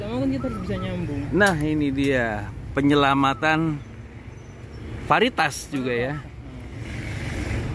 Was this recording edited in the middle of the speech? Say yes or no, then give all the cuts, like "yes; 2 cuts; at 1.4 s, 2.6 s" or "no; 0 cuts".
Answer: no; 0 cuts